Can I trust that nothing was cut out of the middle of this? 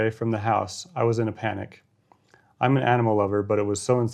yes; 0 cuts

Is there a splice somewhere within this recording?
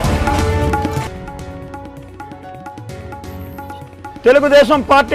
yes; 3 cuts; at 1.1 s, 3.3 s, 4.2 s

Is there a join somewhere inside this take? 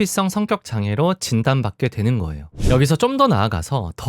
yes; 1 cut; at 2.5 s

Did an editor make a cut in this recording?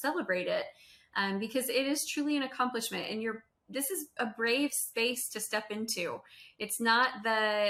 no; 0 cuts

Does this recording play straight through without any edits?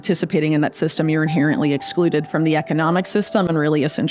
yes; 0 cuts

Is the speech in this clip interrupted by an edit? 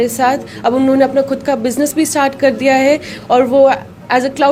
no; 0 cuts

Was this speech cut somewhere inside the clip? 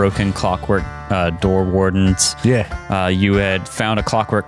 no; 0 cuts

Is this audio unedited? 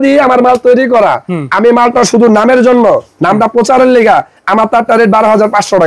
yes; 0 cuts

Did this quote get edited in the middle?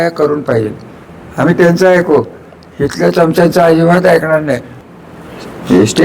yes; 1 cut; at 4.7 s

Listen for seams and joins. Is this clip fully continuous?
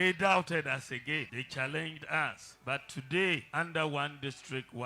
no; 3 cuts; at 1.4 s, 2.5 s, 3.5 s

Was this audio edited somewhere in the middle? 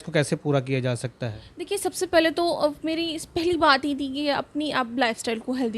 no; 0 cuts

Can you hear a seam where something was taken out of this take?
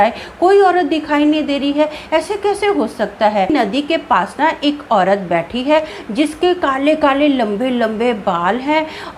yes; 1 cut; at 3.5 s

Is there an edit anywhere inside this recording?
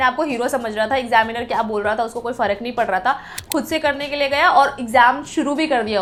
no; 0 cuts

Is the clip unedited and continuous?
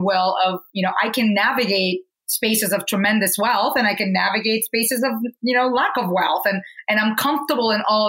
yes; 0 cuts

